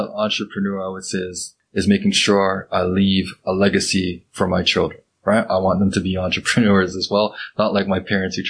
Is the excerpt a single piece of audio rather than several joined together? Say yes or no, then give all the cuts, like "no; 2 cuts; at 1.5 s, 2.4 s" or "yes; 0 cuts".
no; 1 cut; at 1.6 s